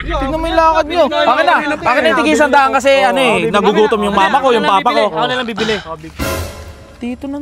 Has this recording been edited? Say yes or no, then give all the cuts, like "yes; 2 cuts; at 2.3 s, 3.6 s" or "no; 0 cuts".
no; 0 cuts